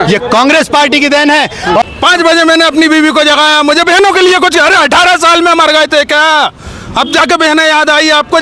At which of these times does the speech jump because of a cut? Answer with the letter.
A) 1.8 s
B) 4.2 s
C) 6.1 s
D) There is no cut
A